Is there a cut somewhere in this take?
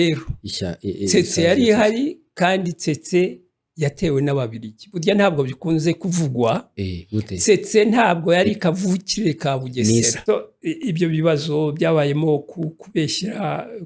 yes; 1 cut; at 10.2 s

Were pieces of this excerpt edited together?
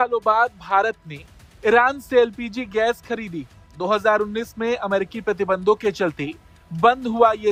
no; 0 cuts

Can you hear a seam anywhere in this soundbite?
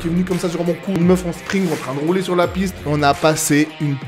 yes; 2 cuts; at 1.0 s, 2.8 s

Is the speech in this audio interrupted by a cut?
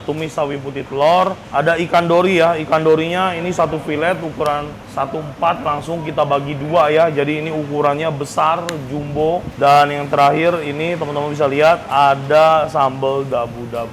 yes; 3 cuts; at 1.4 s, 4.8 s, 9.5 s

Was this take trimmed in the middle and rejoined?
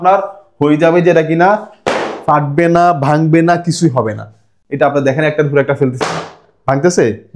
no; 0 cuts

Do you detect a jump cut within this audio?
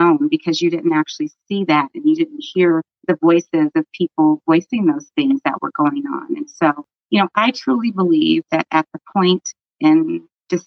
yes; 1 cut; at 2.9 s

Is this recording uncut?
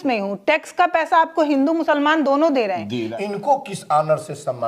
no; 1 cut; at 3.0 s

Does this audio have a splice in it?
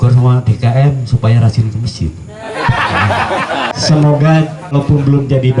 yes; 2 cuts; at 3.7 s, 4.7 s

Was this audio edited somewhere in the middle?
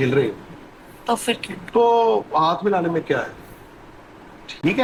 no; 0 cuts

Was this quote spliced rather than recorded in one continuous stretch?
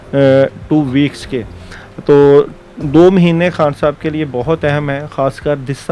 no; 0 cuts

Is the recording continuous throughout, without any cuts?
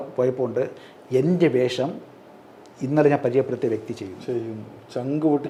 yes; 0 cuts

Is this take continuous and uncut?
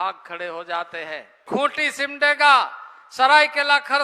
no; 1 cut; at 1.4 s

